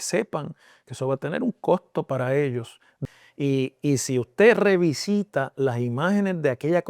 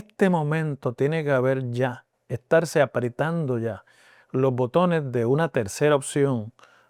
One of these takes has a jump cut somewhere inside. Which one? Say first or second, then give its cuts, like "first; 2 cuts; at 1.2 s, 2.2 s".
first; 1 cut; at 3.0 s